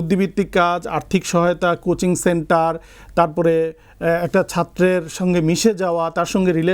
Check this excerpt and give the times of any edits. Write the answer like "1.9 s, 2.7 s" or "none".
none